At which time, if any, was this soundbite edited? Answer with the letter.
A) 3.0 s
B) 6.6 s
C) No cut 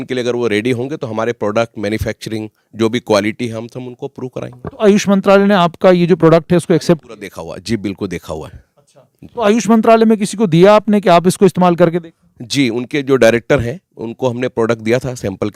C